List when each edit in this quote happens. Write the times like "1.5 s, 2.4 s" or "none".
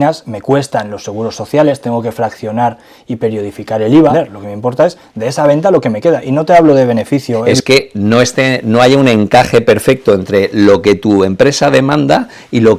4.1 s, 7.5 s

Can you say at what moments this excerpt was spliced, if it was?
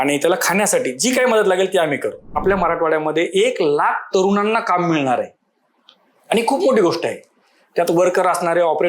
2.4 s

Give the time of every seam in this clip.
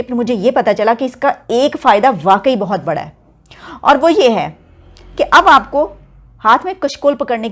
none

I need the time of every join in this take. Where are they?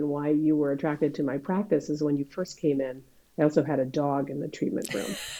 none

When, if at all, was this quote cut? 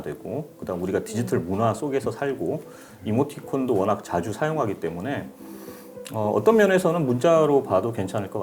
none

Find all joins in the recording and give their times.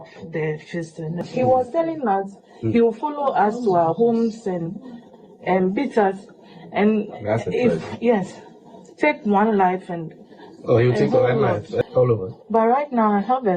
1.3 s, 11.8 s

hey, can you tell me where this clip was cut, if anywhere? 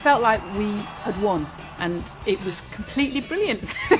0.9 s

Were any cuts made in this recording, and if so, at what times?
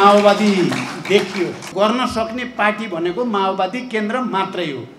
1.7 s

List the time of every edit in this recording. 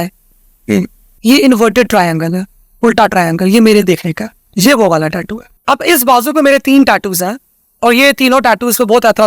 1.0 s, 5.5 s

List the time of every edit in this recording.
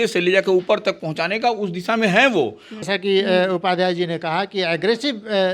2.8 s

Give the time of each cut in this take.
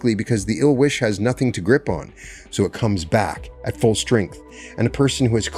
none

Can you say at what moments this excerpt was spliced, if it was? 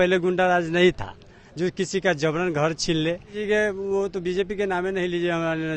3.4 s

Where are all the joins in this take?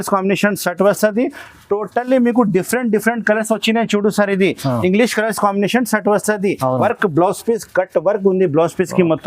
6.8 s

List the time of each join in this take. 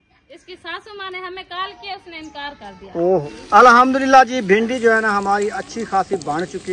3.2 s

